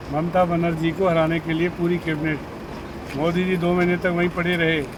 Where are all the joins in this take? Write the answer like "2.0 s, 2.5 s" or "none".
none